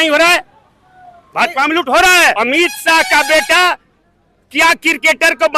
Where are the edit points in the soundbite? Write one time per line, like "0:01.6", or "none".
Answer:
0:02.4

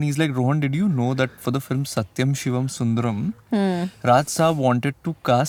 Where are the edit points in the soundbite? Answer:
none

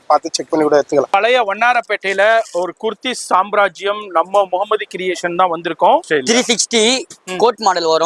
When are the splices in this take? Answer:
0:01.1
0:06.0

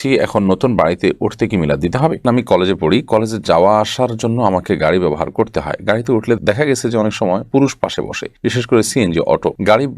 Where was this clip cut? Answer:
0:02.2

